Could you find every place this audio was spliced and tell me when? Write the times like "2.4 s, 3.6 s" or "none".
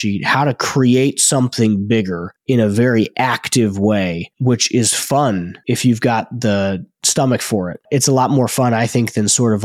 4.3 s, 5.5 s